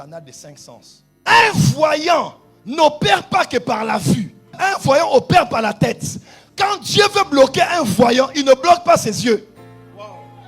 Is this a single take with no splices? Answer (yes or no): no